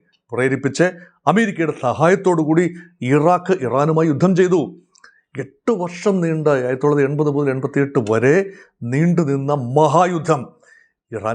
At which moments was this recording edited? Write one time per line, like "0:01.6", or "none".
none